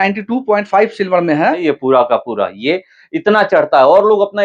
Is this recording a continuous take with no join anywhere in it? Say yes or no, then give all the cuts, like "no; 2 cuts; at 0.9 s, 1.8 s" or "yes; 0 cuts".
no; 1 cut; at 1.6 s